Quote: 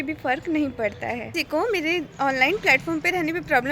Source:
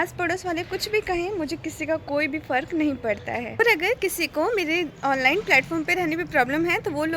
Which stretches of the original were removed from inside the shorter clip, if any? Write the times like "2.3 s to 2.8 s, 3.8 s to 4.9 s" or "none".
3.5 s to 4.1 s